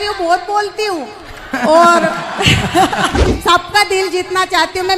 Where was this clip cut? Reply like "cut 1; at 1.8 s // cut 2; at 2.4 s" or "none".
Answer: cut 1; at 3.2 s